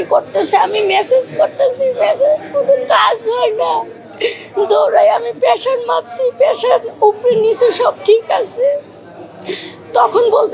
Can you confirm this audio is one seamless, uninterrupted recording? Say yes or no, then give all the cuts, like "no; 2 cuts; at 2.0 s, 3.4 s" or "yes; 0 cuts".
yes; 0 cuts